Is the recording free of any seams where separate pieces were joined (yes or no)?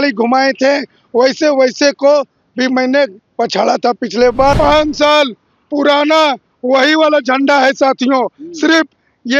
no